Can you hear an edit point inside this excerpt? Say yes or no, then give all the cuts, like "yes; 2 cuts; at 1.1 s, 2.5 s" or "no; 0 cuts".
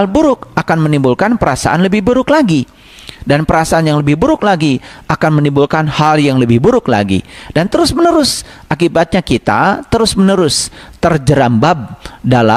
no; 0 cuts